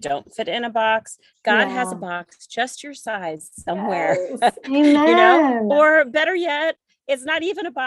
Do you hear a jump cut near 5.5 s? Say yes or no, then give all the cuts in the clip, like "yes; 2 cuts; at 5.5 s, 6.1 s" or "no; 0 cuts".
no; 0 cuts